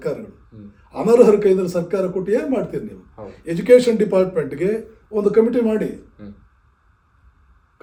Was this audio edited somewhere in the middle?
no; 0 cuts

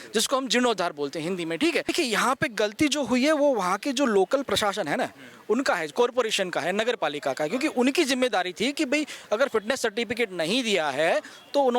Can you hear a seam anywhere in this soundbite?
yes; 1 cut; at 1.9 s

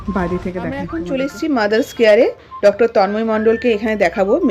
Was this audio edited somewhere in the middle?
yes; 1 cut; at 1.0 s

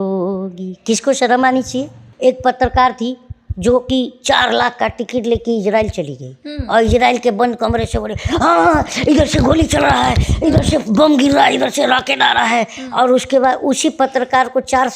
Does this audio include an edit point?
yes; 1 cut; at 2.1 s

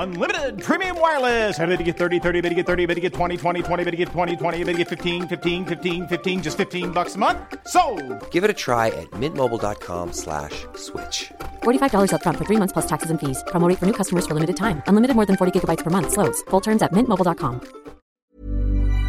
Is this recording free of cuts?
no; 1 cut; at 18.1 s

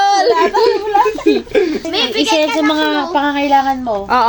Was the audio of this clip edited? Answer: yes; 1 cut; at 1.9 s

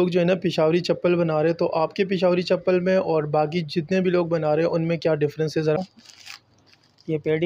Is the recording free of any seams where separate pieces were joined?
no; 1 cut; at 5.8 s

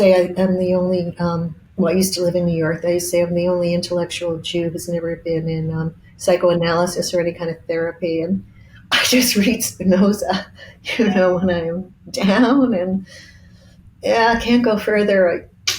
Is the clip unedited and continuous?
no; 1 cut; at 1.6 s

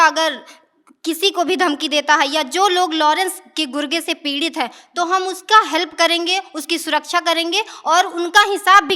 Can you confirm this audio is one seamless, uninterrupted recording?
yes; 0 cuts

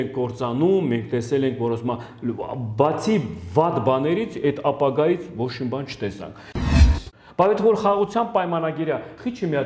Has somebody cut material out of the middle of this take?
yes; 1 cut; at 6.6 s

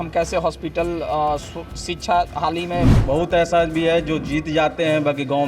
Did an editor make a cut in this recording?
yes; 1 cut; at 3.0 s

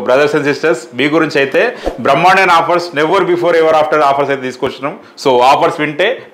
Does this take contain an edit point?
no; 0 cuts

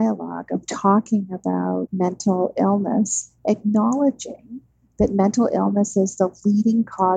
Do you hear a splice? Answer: yes; 1 cut; at 1.9 s

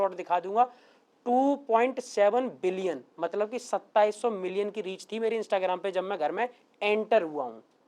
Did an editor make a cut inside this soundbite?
no; 0 cuts

